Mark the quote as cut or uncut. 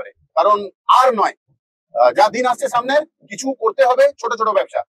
uncut